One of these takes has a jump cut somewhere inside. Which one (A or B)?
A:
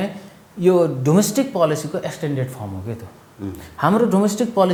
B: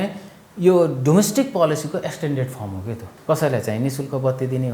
B